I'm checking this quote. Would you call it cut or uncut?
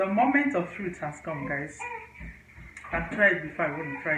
uncut